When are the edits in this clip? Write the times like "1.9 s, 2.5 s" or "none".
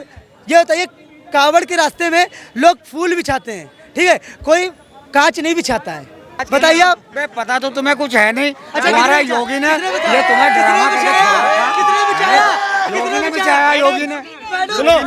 6.3 s